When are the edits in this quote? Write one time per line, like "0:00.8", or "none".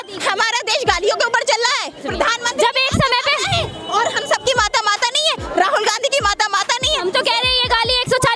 0:02.0